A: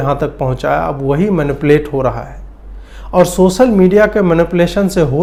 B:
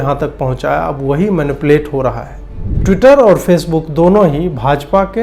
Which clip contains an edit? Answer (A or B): B